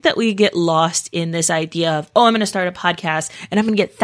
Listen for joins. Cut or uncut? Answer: uncut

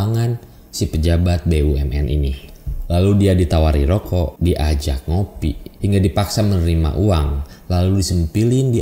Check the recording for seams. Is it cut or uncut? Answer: cut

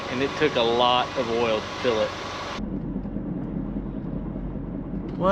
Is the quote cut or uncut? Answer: uncut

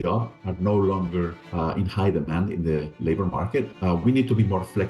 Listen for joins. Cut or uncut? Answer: cut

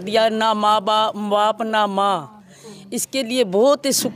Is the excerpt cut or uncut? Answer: uncut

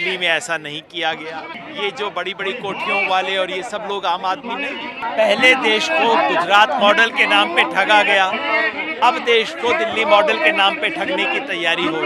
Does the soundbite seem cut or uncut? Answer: cut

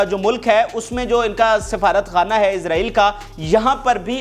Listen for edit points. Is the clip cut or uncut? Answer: uncut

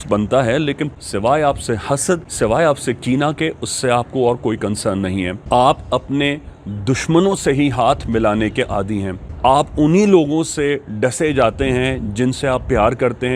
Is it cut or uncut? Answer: cut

